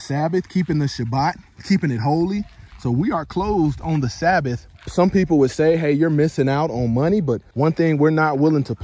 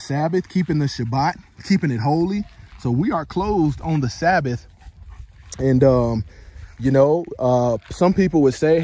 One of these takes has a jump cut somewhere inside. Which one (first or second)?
first